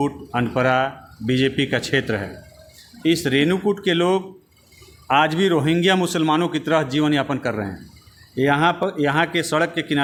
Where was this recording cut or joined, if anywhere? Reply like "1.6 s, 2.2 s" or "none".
none